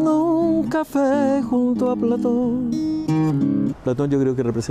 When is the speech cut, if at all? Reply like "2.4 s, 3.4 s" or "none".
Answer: 3.8 s